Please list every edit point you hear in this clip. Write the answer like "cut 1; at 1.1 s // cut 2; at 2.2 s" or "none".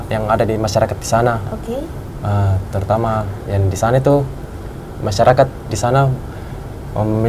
none

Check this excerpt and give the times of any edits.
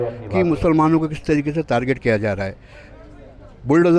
none

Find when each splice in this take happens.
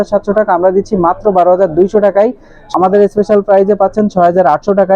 cut 1; at 2.5 s

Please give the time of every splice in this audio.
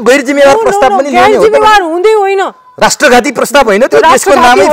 none

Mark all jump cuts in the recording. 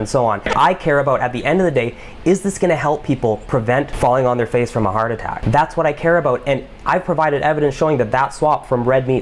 cut 1; at 5.3 s

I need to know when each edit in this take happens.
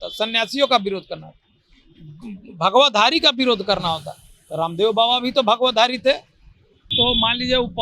cut 1; at 6.9 s

